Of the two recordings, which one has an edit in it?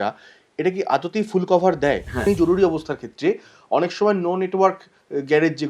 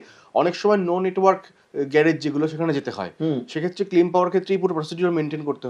first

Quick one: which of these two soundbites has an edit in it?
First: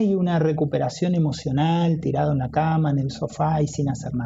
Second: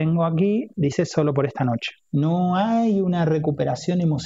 second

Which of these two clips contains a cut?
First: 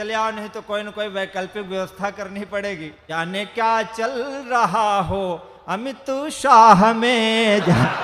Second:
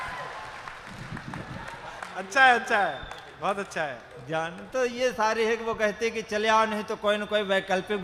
first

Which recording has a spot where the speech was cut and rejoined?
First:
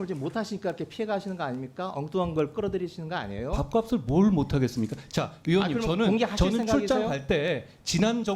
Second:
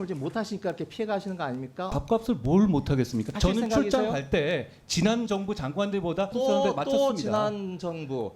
second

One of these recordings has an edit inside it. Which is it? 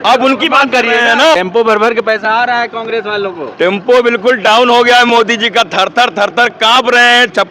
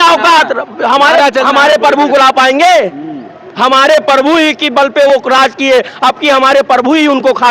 first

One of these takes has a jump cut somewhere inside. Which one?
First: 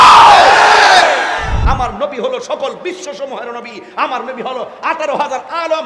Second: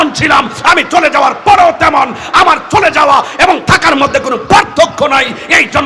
first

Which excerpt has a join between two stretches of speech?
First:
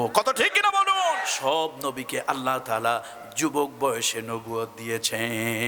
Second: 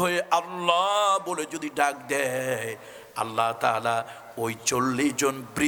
first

